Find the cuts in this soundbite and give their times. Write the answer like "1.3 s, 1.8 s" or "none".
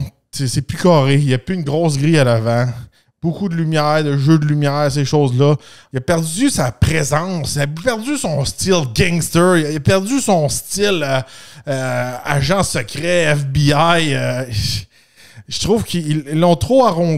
5.8 s